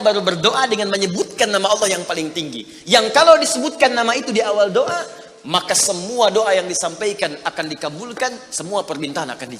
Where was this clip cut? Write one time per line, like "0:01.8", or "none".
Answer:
none